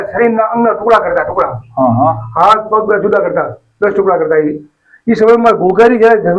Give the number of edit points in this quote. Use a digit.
0